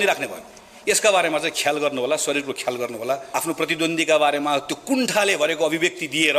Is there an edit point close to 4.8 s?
no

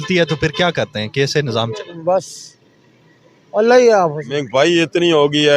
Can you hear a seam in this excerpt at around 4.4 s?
yes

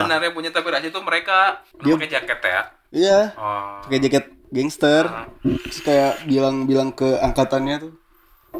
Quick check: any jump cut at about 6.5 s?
no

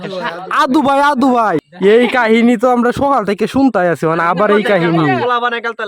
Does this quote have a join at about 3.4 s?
no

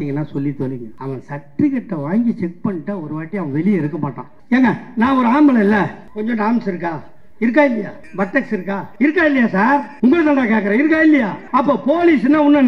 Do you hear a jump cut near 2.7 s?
no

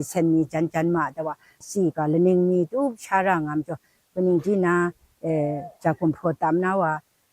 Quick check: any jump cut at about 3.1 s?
no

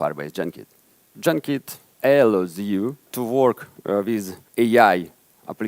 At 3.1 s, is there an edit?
yes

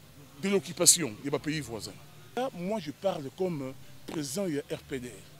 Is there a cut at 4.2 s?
no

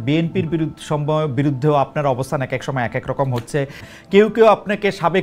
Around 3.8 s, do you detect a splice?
yes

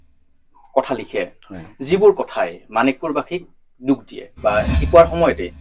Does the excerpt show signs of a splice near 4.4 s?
yes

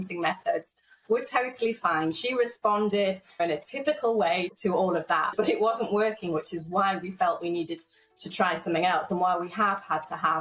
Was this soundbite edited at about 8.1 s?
no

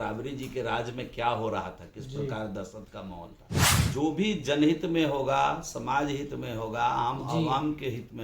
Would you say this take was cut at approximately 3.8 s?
yes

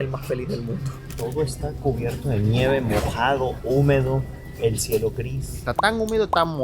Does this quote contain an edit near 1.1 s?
yes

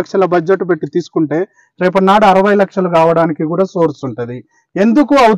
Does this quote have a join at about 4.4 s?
no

